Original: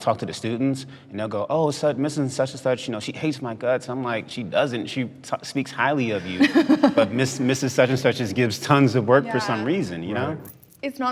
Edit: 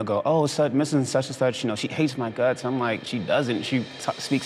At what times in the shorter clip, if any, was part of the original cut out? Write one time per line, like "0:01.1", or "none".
none